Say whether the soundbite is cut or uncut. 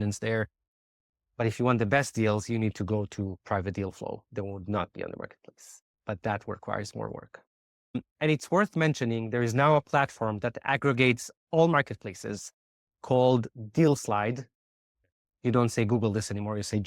cut